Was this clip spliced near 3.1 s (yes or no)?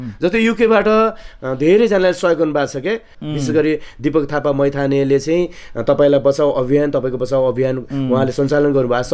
yes